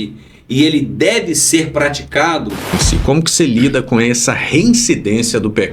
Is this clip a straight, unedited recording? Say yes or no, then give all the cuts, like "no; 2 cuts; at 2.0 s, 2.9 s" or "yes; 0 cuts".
no; 1 cut; at 2.8 s